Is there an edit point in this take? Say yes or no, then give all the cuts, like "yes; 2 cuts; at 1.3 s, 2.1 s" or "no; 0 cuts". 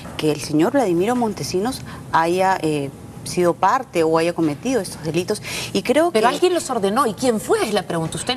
yes; 1 cut; at 2.6 s